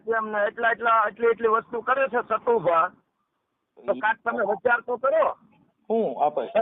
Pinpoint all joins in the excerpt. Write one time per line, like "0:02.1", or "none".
none